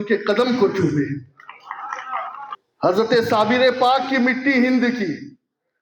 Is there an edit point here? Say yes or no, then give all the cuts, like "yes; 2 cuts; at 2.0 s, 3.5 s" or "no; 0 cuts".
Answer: yes; 1 cut; at 2.7 s